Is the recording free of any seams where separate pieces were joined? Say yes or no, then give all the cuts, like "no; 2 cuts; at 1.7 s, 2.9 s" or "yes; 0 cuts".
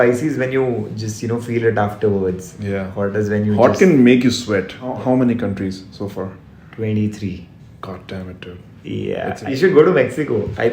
no; 2 cuts; at 5.0 s, 9.4 s